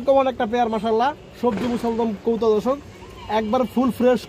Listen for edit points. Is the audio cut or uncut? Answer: uncut